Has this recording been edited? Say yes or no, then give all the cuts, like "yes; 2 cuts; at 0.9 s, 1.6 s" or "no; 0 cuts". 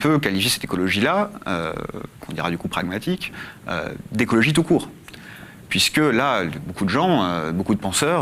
no; 0 cuts